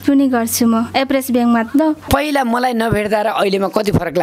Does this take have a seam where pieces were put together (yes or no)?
yes